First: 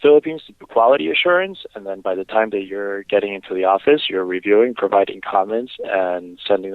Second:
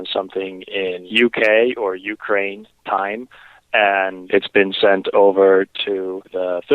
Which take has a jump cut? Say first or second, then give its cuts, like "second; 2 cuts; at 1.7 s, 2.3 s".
second; 3 cuts; at 1.0 s, 4.2 s, 5.7 s